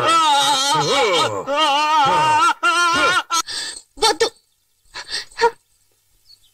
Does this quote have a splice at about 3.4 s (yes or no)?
no